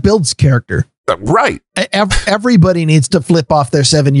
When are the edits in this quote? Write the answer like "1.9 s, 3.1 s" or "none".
none